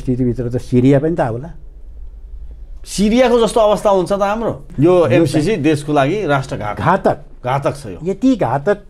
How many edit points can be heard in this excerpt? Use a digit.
1